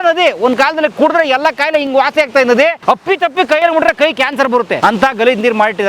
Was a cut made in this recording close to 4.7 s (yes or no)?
yes